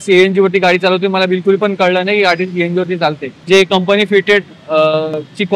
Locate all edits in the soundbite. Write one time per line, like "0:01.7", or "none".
0:03.4